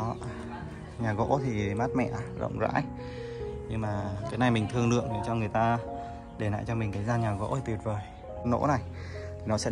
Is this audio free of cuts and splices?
no; 1 cut; at 8.3 s

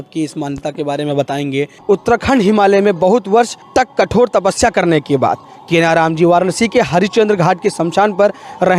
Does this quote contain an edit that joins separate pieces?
yes; 2 cuts; at 1.7 s, 3.6 s

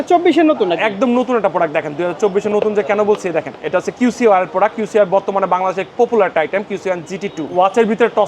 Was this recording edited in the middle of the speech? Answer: yes; 2 cuts; at 3.6 s, 7.5 s

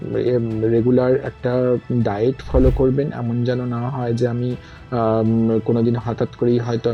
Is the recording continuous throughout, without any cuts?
yes; 0 cuts

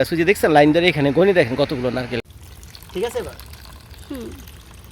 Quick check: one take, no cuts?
no; 1 cut; at 2.2 s

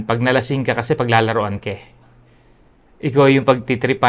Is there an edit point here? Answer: no; 0 cuts

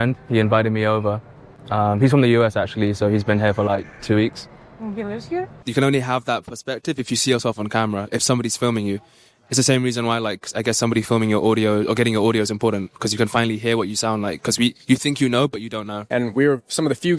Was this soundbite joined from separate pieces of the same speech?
yes; 2 cuts; at 5.6 s, 16.0 s

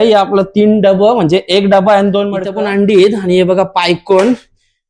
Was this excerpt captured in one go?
no; 1 cut; at 2.4 s

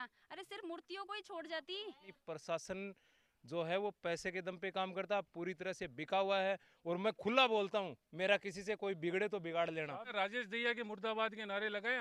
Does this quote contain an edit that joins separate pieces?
yes; 2 cuts; at 2.2 s, 10.1 s

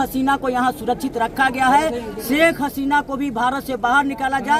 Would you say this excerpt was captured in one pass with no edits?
yes; 0 cuts

